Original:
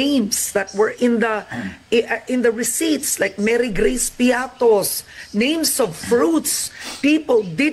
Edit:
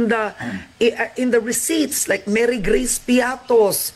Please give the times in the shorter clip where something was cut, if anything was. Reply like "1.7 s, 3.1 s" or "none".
none